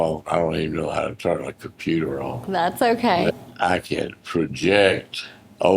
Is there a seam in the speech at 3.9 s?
yes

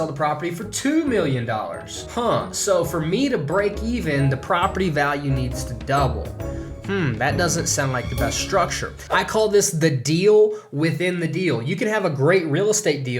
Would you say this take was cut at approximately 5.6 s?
no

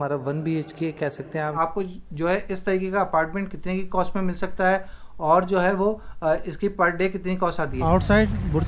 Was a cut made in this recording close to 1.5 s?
yes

